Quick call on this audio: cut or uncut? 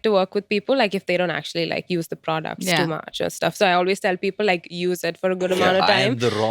uncut